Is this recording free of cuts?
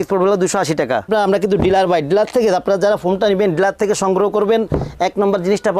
no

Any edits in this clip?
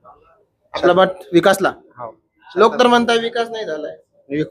no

